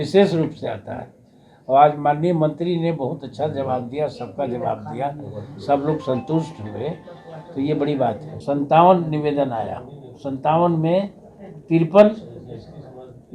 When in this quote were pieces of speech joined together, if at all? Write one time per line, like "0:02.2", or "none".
0:08.3